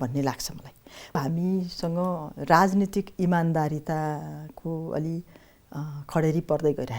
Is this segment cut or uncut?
cut